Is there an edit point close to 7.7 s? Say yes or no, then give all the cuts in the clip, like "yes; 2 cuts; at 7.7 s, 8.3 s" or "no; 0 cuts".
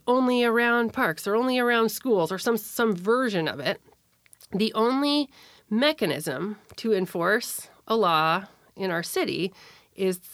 no; 0 cuts